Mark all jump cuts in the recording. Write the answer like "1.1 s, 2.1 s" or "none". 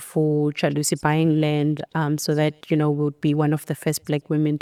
none